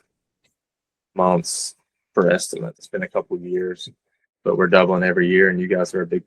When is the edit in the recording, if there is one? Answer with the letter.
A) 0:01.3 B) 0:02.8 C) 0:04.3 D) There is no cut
B